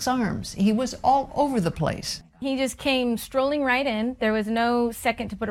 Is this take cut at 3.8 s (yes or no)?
no